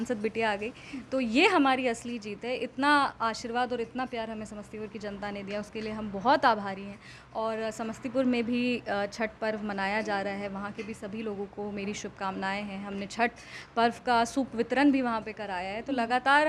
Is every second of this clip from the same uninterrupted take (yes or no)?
yes